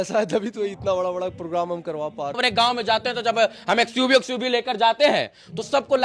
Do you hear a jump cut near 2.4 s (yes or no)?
yes